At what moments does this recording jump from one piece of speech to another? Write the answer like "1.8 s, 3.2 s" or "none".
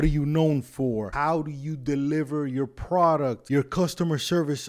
1.1 s, 3.4 s